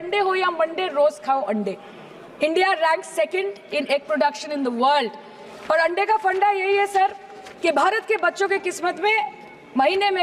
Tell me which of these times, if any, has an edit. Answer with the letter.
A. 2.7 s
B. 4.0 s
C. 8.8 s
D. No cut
D